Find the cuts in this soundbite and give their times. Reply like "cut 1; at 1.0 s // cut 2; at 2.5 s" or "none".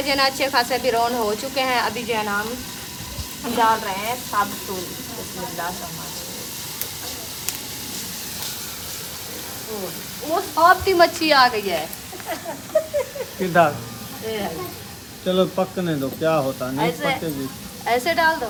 none

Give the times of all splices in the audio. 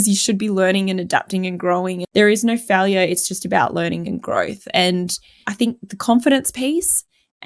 cut 1; at 2.0 s

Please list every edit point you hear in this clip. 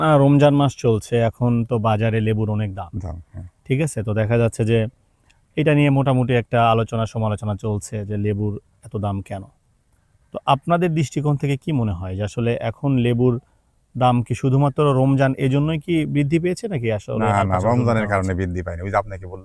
none

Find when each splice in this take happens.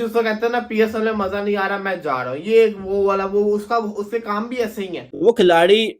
cut 1; at 5.0 s

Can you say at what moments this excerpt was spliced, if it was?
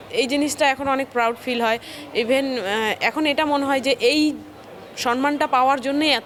none

